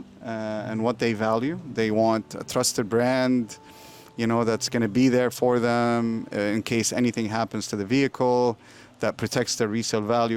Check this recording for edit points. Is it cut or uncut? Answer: uncut